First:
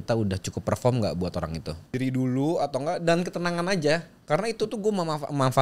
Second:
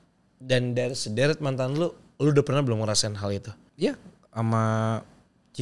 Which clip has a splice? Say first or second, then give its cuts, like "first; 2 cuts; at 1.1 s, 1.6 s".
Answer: first; 1 cut; at 1.9 s